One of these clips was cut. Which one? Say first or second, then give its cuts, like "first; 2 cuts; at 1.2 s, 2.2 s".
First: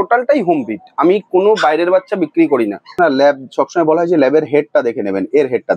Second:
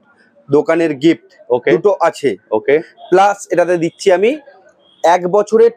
first; 1 cut; at 2.9 s